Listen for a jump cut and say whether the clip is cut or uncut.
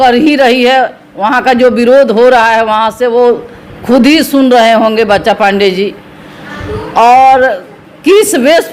uncut